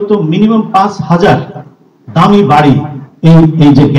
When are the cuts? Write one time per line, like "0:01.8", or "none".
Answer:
none